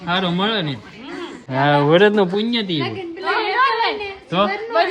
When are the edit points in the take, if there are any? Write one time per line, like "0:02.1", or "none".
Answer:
0:01.4